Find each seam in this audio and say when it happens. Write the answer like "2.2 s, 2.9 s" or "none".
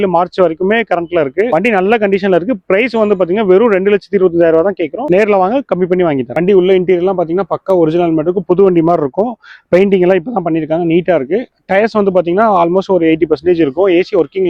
1.5 s, 6.3 s

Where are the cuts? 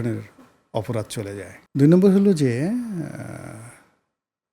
1.6 s

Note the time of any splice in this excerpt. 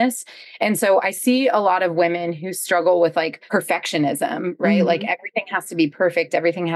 3.4 s

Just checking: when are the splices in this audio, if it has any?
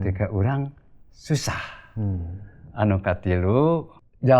none

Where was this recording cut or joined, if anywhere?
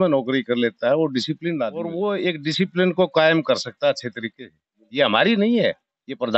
1.8 s

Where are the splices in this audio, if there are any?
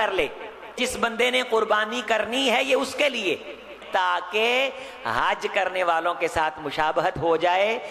0.8 s, 3.8 s

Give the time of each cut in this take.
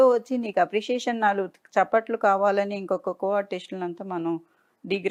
none

